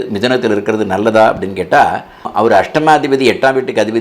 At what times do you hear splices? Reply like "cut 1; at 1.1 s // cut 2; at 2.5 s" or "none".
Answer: cut 1; at 2.2 s